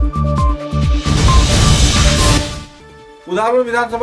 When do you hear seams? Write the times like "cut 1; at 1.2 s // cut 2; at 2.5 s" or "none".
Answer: none